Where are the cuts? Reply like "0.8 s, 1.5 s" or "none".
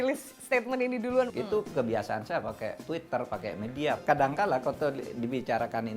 1.3 s, 4.0 s